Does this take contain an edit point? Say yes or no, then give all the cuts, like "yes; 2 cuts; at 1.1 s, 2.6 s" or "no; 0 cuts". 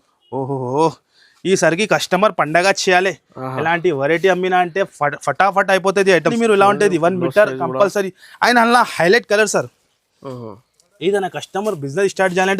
yes; 1 cut; at 6.3 s